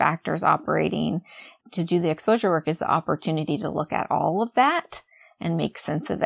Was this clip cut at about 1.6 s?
yes; 1 cut; at 1.6 s

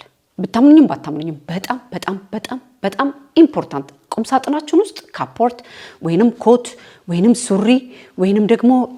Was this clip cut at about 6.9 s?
no; 0 cuts

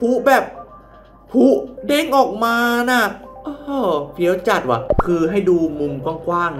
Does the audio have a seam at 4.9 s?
yes; 1 cut; at 4.9 s

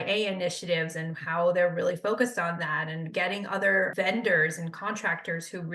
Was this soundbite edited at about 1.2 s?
no; 1 cut; at 3.9 s

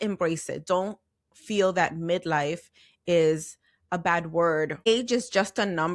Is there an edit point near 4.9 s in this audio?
yes; 1 cut; at 4.9 s

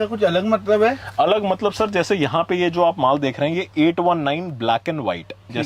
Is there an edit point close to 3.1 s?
no; 0 cuts

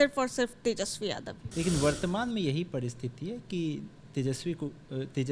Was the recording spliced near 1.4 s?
yes; 1 cut; at 1.4 s

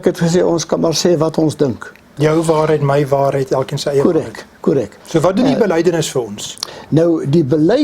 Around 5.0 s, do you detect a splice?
yes; 2 cuts; at 2.1 s, 5.0 s

